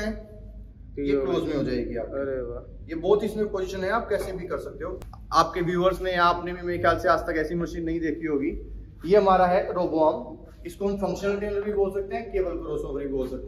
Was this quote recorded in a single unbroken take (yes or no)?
no